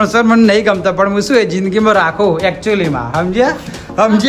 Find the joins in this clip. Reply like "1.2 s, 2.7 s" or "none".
none